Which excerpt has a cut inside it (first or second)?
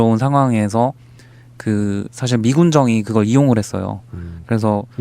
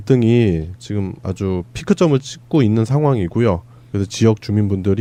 first